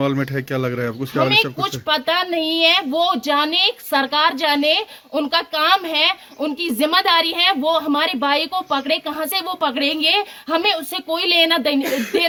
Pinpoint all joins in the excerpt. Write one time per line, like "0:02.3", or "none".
none